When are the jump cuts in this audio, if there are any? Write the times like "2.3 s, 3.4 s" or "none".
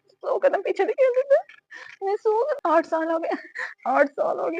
2.6 s